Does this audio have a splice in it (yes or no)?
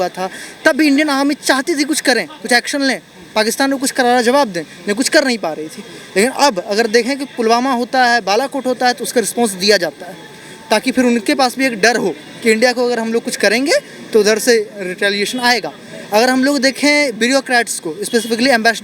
no